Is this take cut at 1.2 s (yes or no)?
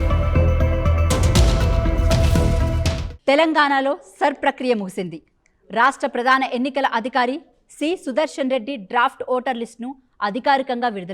no